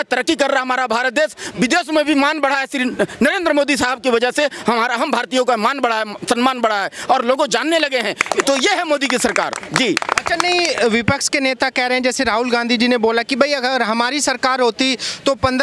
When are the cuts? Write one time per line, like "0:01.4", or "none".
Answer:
none